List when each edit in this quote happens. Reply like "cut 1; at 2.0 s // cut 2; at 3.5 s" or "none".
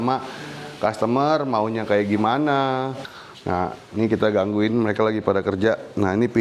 cut 1; at 3.0 s